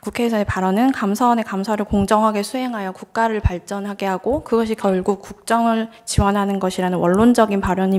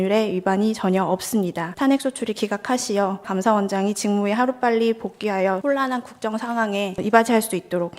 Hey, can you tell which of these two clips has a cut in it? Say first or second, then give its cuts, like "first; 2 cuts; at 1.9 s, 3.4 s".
second; 4 cuts; at 1.7 s, 3.3 s, 5.6 s, 7.0 s